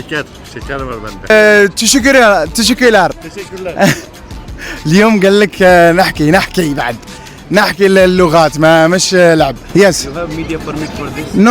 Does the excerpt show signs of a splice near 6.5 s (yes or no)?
no